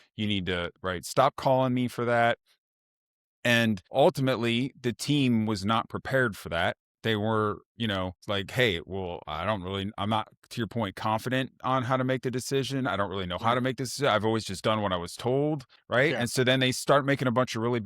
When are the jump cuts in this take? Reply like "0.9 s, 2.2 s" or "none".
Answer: 3.9 s, 8.2 s, 15.7 s